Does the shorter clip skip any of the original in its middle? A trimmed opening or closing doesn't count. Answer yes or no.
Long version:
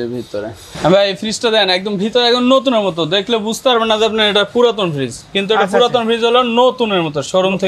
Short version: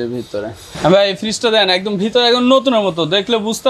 no